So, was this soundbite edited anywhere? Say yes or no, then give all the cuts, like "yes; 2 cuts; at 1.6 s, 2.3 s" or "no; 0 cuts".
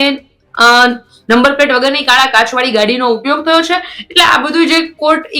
no; 0 cuts